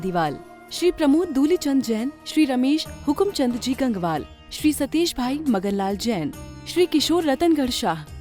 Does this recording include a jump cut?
no; 0 cuts

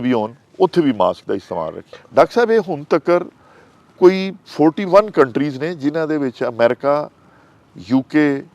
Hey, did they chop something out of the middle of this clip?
yes; 1 cut; at 2.0 s

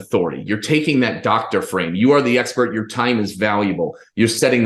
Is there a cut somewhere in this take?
no; 0 cuts

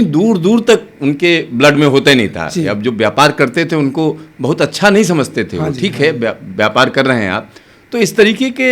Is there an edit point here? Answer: no; 0 cuts

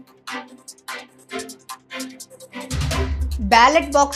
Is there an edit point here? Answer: no; 0 cuts

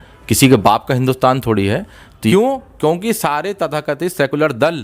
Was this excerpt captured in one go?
no; 1 cut; at 2.3 s

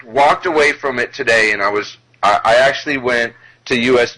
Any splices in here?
yes; 1 cut; at 1.4 s

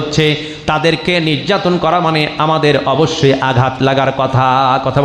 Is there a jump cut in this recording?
no; 0 cuts

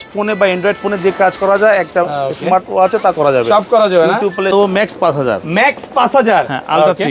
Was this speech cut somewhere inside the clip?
yes; 1 cut; at 4.6 s

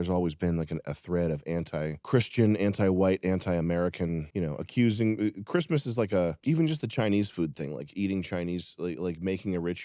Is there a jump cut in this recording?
no; 0 cuts

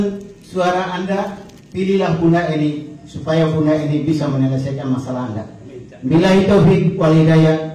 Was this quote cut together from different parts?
no; 0 cuts

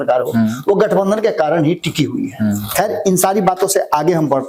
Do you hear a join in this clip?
no; 0 cuts

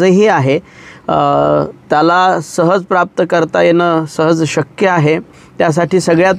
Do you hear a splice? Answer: no; 0 cuts

